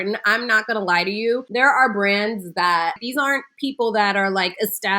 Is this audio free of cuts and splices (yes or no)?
no